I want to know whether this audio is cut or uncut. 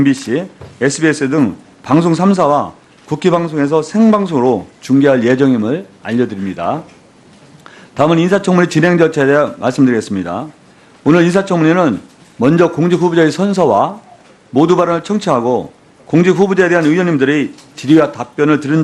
uncut